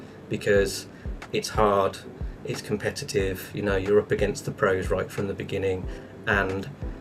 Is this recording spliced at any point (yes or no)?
no